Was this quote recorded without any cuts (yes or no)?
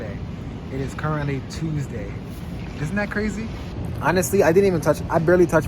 no